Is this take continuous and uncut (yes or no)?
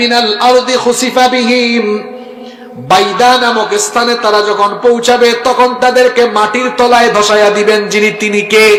yes